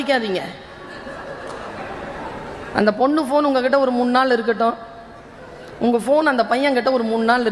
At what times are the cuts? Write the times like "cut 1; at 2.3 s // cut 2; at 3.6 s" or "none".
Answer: none